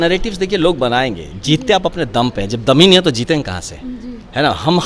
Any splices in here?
no; 0 cuts

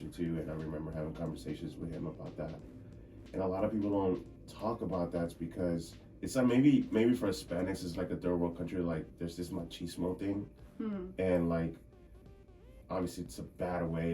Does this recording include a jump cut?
yes; 1 cut; at 6.0 s

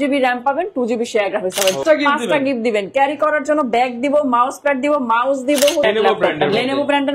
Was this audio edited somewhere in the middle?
yes; 2 cuts; at 1.8 s, 5.8 s

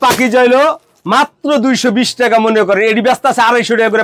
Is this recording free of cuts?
yes; 0 cuts

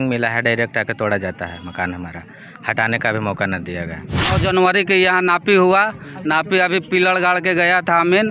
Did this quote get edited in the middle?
yes; 1 cut; at 4.4 s

